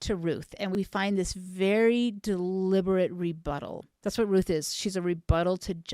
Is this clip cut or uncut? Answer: uncut